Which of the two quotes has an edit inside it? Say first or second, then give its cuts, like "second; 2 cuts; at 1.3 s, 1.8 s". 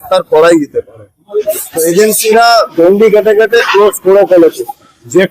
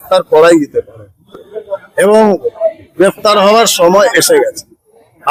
first; 1 cut; at 1.5 s